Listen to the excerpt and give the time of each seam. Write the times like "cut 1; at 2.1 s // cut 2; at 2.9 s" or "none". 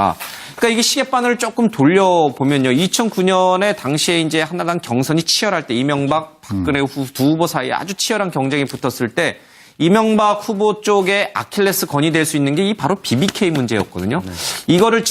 none